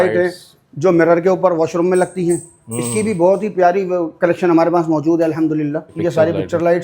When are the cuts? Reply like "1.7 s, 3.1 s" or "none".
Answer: 5.9 s